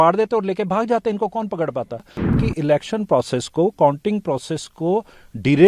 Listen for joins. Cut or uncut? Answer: cut